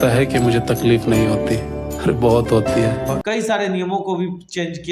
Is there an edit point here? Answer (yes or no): yes